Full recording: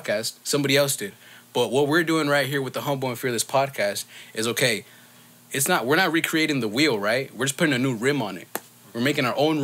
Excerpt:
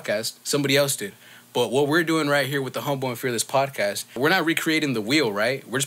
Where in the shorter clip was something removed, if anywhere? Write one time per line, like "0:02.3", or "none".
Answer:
0:04.2